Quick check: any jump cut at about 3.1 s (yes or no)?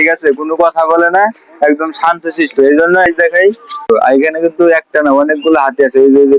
yes